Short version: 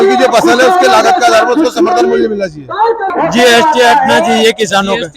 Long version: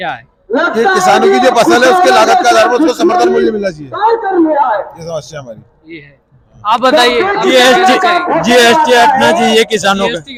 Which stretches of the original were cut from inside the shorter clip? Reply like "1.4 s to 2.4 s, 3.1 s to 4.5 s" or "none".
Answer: 4.3 s to 8.2 s